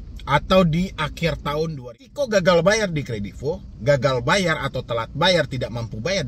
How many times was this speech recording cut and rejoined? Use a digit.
1